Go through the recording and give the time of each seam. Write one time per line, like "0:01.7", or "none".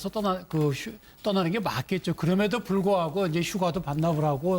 0:01.2